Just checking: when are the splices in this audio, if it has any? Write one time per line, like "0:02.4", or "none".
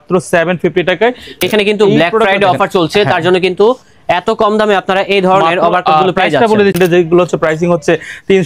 0:01.4
0:06.8